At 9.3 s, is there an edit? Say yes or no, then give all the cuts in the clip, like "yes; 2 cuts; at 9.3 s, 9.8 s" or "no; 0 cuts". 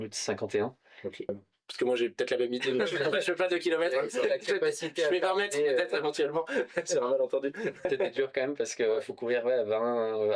no; 2 cuts; at 1.4 s, 7.9 s